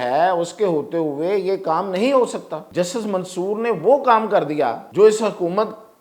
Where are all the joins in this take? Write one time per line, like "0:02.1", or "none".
0:02.6
0:04.8